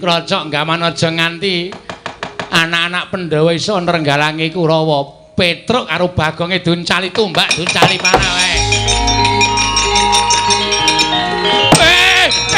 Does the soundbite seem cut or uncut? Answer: uncut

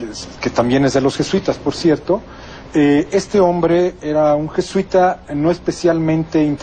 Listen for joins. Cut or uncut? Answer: cut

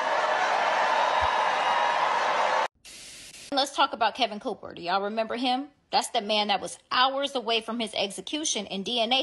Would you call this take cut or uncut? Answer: cut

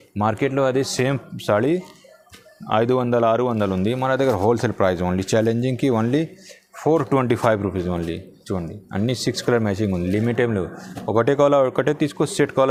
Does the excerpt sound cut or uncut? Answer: uncut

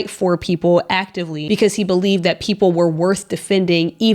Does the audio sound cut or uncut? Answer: cut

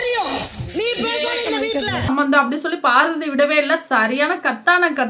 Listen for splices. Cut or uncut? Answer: cut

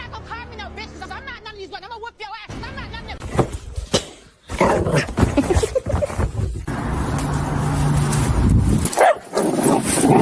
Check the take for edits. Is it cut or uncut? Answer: uncut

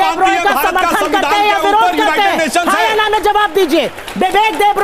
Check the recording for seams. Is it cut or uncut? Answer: cut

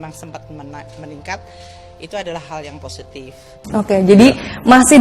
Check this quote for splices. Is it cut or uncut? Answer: cut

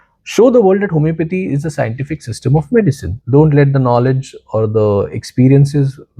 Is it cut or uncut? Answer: cut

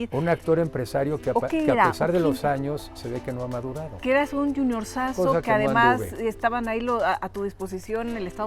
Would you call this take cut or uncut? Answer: cut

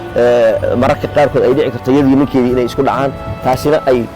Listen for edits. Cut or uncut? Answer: uncut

